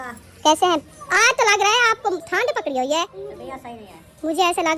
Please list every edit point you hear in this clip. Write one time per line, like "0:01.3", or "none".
0:01.0
0:02.3
0:03.2

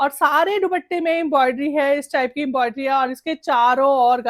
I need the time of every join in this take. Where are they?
none

